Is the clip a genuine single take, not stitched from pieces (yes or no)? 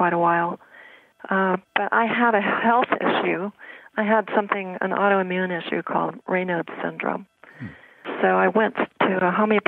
no